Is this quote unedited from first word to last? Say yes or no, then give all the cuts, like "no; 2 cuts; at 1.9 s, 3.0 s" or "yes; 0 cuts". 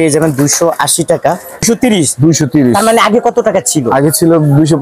no; 1 cut; at 1.6 s